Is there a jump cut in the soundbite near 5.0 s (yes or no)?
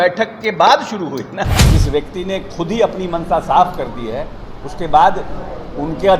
no